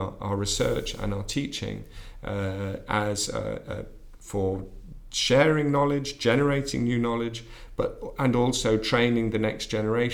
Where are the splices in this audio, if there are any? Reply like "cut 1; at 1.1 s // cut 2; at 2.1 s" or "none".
none